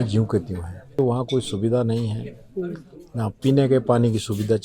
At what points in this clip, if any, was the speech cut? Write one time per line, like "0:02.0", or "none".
0:00.9